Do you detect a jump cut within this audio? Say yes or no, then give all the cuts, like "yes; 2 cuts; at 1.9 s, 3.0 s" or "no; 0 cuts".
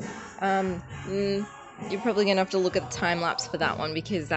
no; 0 cuts